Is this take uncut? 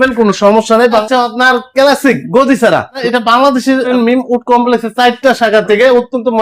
no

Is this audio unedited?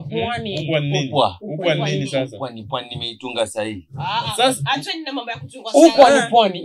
yes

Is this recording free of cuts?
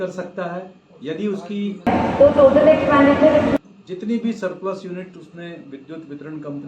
no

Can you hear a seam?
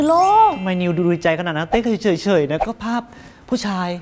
no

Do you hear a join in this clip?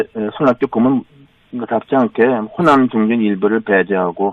yes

